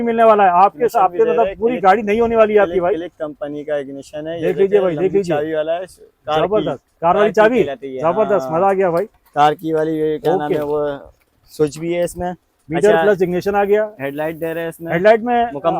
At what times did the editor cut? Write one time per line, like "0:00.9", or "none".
none